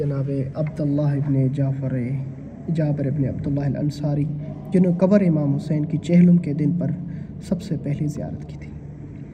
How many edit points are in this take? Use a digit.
0